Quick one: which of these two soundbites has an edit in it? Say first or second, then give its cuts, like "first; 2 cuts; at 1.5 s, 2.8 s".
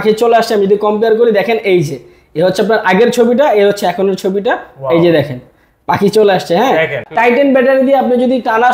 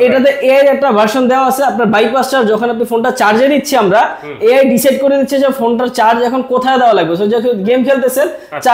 first; 1 cut; at 7.0 s